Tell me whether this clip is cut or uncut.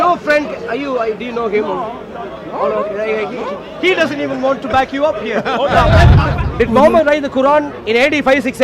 cut